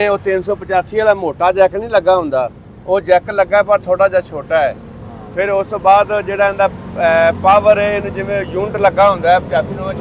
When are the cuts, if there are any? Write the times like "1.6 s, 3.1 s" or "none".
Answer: none